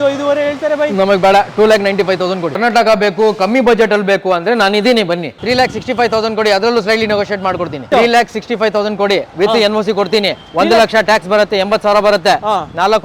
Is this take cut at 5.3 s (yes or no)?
yes